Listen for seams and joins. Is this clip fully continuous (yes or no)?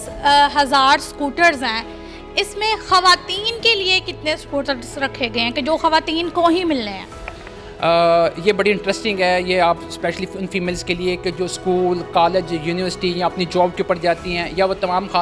yes